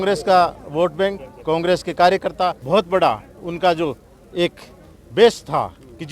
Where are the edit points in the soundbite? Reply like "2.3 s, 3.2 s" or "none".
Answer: 2.6 s